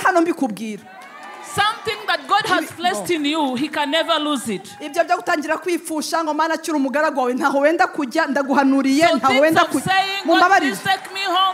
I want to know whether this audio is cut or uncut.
uncut